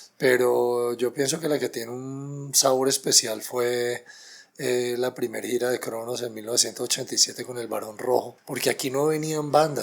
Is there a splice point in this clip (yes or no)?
yes